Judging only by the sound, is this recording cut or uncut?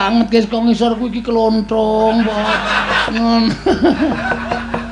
cut